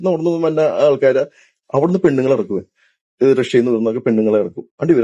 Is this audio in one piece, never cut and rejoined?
yes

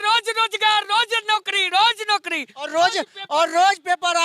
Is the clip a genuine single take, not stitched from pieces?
yes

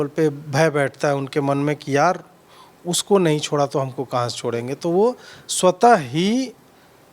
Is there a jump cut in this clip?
no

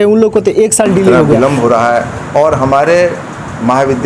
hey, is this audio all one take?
no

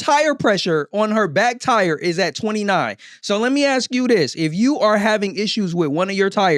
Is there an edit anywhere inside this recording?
no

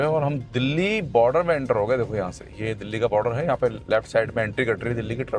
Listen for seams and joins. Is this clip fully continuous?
yes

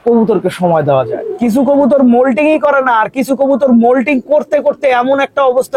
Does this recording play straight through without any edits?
no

